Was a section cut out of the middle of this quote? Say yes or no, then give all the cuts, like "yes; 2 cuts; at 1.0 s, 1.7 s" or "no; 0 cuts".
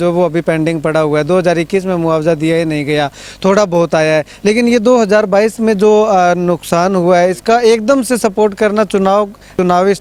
no; 0 cuts